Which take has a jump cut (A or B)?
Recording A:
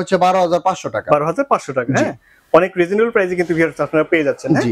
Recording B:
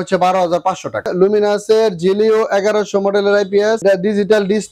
B